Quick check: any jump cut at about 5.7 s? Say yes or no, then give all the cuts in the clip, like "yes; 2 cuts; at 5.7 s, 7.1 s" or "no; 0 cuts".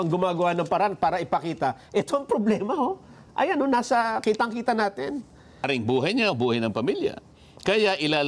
yes; 1 cut; at 5.7 s